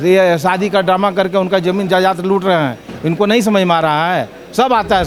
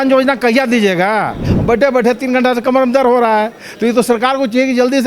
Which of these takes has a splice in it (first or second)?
second